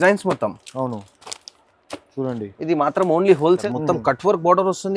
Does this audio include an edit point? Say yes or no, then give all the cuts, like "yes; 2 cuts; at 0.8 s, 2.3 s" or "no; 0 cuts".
yes; 1 cut; at 3.6 s